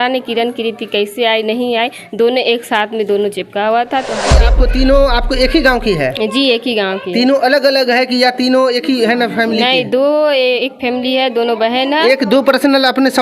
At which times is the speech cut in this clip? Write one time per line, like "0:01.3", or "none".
0:04.5

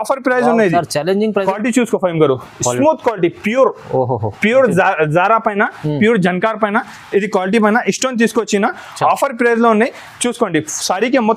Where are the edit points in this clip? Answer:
0:01.4

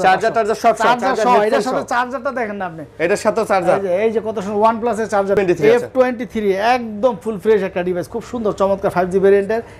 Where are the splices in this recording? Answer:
0:05.4

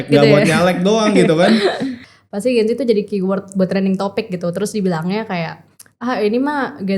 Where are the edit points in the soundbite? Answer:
0:02.0

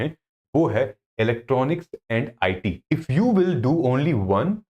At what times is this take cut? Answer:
0:02.8

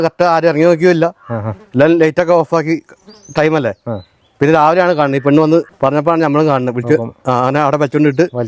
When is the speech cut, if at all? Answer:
0:05.7

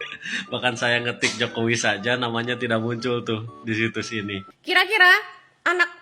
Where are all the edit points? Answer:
0:04.5

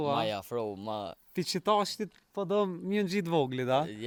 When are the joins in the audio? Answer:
none

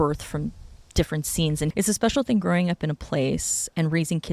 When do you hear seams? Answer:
0:01.7

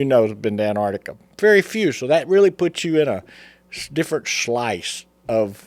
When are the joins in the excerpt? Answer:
none

